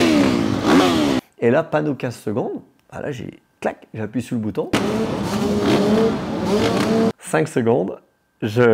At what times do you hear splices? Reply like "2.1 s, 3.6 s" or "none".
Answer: 1.2 s, 7.2 s